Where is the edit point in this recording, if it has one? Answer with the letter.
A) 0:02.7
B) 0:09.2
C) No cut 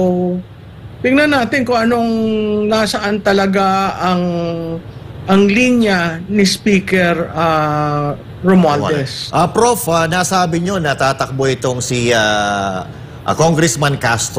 C